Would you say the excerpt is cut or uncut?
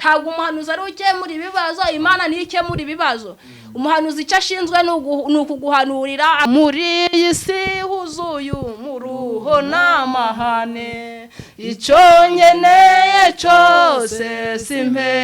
cut